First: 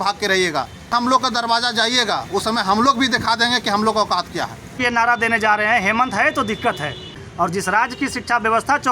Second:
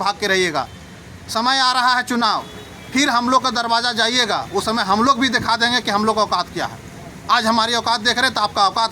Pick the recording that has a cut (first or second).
first